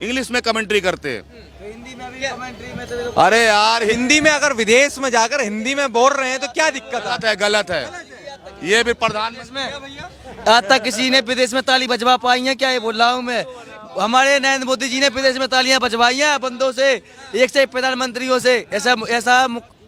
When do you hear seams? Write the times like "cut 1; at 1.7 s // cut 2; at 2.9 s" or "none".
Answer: none